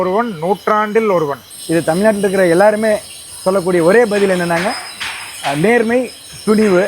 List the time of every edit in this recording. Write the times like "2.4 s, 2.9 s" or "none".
1.5 s

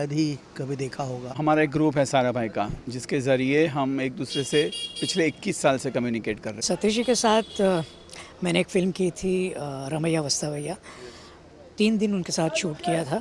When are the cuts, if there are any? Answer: 1.2 s, 6.5 s

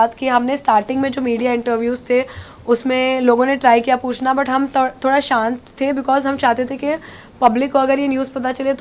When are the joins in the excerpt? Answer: none

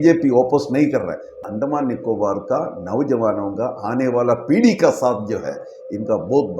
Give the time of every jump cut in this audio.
1.4 s

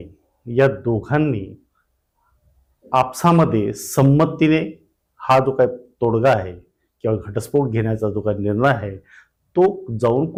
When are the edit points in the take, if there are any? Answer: none

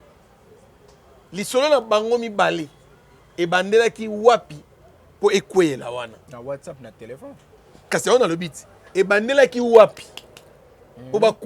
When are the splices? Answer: none

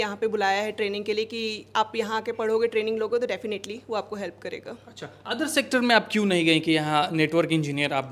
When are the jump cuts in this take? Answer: none

